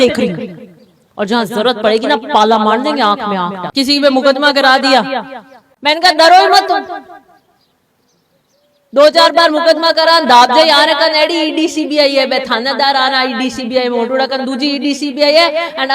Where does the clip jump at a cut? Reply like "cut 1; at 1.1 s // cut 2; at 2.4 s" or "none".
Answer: cut 1; at 3.6 s

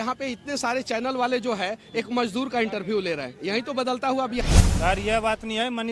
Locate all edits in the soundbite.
cut 1; at 4.4 s

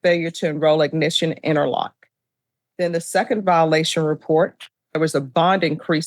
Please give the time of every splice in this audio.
cut 1; at 5.0 s

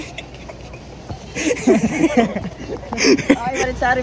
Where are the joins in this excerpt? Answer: none

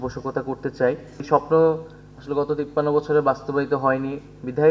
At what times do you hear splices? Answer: cut 1; at 1.2 s

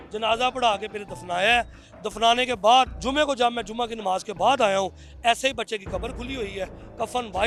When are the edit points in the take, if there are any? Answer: none

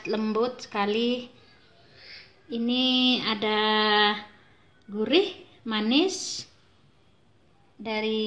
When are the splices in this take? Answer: none

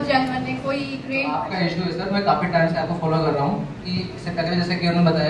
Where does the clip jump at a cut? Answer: cut 1; at 1.5 s

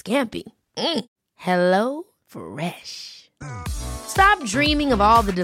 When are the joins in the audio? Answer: none

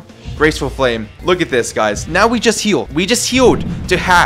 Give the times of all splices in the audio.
cut 1; at 1.1 s // cut 2; at 2.5 s

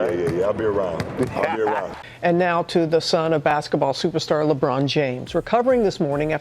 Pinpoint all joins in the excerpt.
cut 1; at 1.9 s

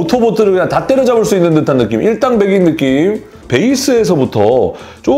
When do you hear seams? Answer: none

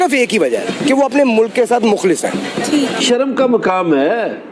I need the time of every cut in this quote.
cut 1; at 3.0 s

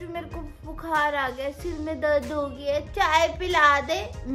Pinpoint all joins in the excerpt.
none

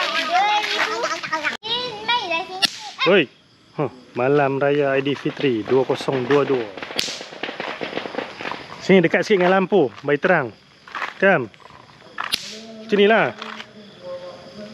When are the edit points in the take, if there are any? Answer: cut 1; at 1.6 s

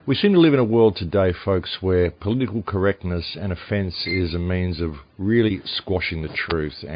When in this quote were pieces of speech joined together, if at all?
cut 1; at 6.0 s

